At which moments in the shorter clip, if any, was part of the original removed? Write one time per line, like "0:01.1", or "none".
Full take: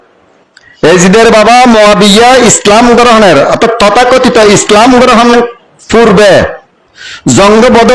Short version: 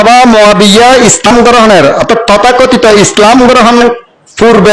0:01.3